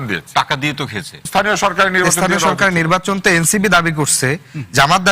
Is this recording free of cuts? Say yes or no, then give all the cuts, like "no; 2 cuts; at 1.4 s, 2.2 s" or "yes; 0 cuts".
no; 1 cut; at 1.3 s